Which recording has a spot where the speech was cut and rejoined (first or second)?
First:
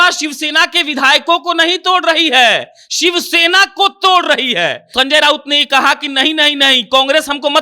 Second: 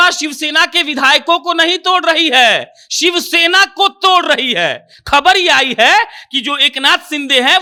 first